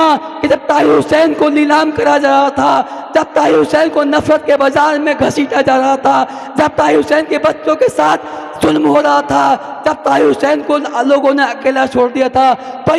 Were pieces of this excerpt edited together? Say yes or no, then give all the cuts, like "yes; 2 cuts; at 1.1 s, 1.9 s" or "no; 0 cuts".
no; 0 cuts